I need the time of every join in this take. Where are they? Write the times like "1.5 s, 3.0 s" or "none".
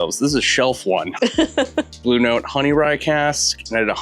1.9 s